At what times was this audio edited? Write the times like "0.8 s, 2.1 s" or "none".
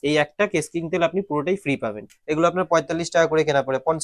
2.0 s